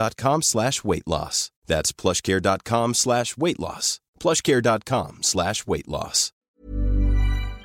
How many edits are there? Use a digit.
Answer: 1